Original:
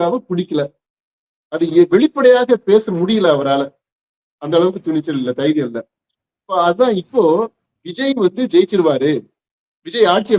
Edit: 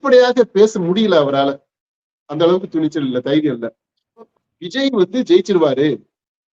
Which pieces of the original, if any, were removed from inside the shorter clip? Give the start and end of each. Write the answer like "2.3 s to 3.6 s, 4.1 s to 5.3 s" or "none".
6.4 s to 7.5 s